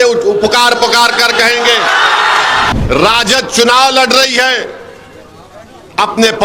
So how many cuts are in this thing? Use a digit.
1